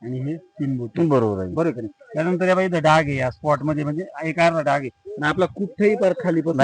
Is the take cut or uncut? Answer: uncut